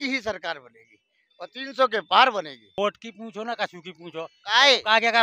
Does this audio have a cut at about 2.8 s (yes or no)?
yes